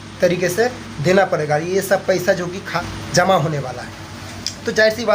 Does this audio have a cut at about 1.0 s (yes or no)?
no